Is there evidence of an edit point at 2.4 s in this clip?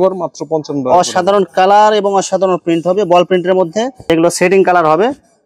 no; 1 cut; at 4.1 s

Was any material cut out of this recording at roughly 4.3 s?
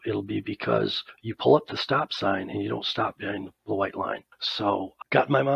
yes; 1 cut; at 4.3 s

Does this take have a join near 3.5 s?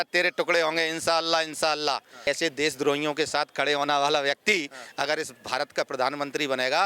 no; 1 cut; at 2.3 s

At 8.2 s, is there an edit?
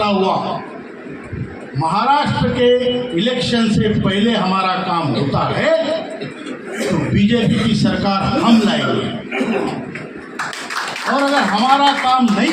no; 0 cuts

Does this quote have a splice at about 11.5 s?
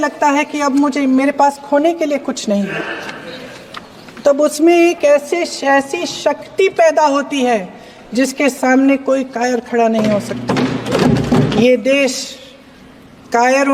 yes; 1 cut; at 11.5 s

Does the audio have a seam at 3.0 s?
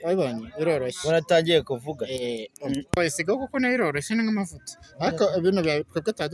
yes; 1 cut; at 3.0 s

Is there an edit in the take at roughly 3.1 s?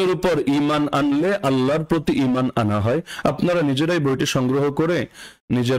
no; 0 cuts

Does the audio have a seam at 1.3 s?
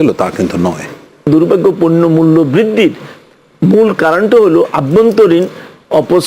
yes; 1 cut; at 1.3 s

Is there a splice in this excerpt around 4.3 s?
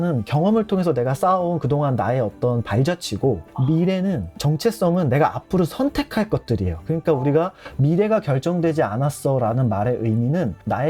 no; 0 cuts

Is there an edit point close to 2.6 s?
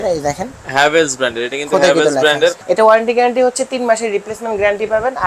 yes; 1 cut; at 2.6 s

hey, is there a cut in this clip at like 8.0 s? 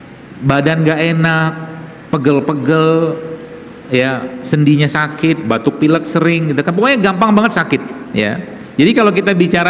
yes; 1 cut; at 8.0 s

